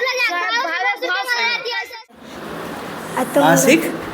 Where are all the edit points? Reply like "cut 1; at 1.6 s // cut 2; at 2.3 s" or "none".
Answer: cut 1; at 2.2 s